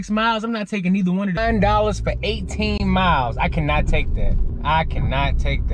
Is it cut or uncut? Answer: cut